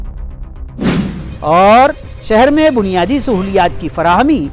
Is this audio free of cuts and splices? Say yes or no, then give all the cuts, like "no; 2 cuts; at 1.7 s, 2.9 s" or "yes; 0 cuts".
yes; 0 cuts